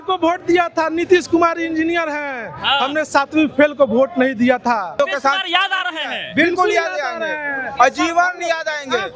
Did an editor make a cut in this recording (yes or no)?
yes